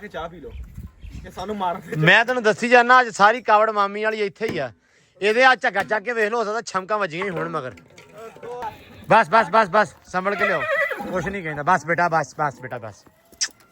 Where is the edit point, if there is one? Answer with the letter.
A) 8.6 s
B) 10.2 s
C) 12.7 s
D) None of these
A